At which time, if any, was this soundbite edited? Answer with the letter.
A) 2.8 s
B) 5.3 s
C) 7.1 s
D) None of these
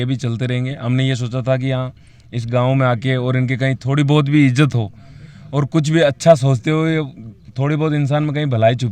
D